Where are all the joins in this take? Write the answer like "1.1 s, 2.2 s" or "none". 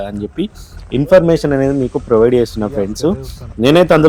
none